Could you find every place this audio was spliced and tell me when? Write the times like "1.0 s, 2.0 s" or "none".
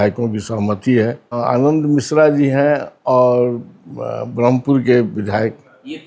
1.4 s